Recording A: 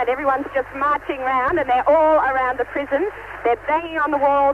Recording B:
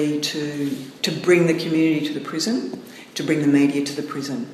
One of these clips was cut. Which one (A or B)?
B